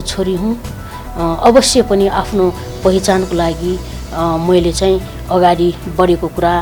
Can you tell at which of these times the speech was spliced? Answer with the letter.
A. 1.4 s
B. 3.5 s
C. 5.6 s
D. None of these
D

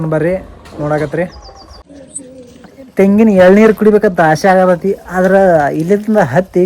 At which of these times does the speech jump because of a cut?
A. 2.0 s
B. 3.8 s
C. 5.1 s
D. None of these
A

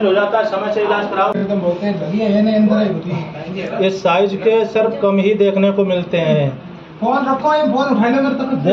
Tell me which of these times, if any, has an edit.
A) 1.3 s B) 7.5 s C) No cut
A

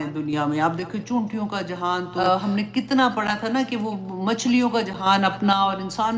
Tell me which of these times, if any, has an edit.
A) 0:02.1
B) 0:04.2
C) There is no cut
A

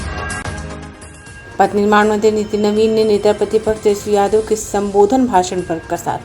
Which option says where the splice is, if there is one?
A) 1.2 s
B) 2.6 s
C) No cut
A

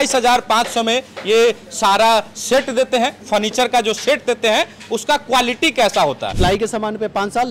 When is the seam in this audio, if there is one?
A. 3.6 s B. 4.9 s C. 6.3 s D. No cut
C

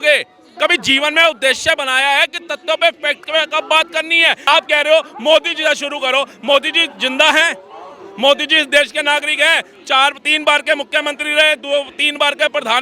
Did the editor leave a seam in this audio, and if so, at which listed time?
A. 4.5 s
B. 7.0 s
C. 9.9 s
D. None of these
A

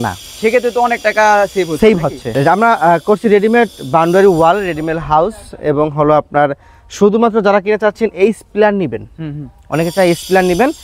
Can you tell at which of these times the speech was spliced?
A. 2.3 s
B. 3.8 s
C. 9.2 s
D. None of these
A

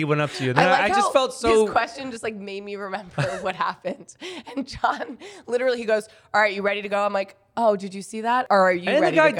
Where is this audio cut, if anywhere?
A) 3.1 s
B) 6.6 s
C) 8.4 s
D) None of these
C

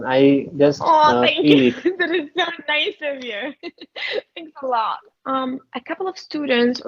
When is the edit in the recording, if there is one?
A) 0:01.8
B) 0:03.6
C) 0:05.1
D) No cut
C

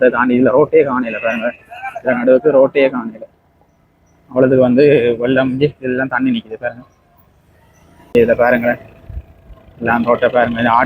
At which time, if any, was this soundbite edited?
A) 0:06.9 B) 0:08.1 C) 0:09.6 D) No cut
B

